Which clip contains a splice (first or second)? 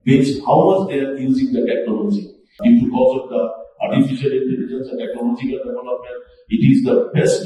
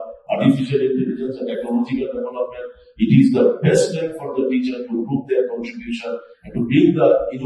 first